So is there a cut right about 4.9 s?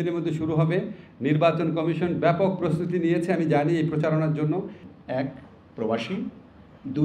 yes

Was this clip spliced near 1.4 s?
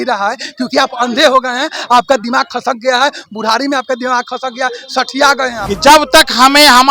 no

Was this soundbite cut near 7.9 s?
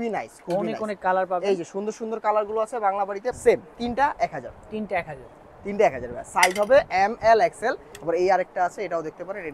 yes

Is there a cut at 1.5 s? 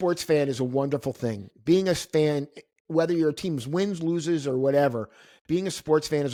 no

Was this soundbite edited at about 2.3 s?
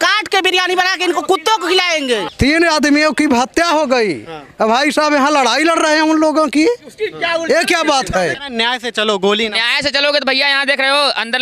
yes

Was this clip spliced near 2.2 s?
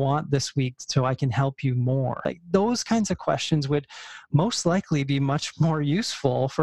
yes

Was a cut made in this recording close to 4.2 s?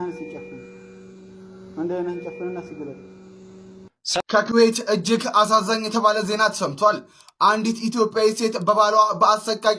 yes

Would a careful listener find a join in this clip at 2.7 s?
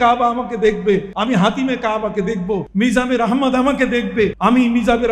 yes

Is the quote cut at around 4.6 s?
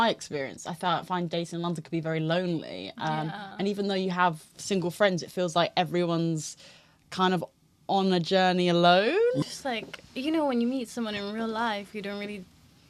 no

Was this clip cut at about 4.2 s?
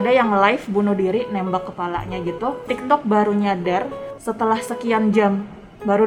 no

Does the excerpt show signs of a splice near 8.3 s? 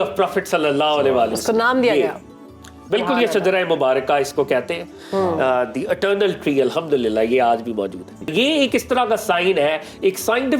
yes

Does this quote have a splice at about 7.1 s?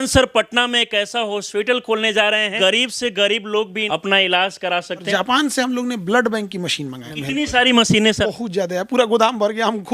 yes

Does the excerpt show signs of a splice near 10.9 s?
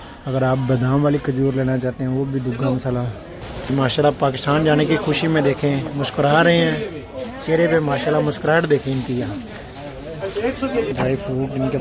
yes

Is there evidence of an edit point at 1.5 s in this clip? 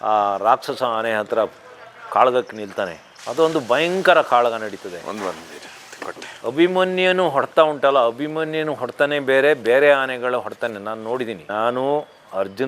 no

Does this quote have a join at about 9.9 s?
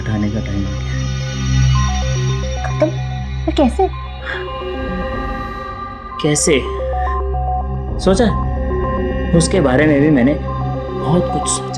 no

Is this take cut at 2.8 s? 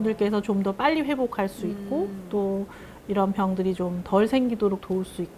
no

